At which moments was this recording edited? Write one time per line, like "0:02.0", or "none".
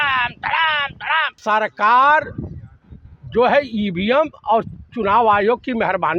0:01.4